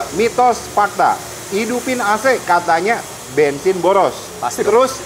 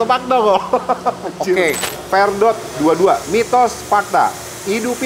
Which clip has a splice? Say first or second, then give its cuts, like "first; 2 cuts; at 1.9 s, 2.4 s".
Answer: second; 1 cut; at 1.9 s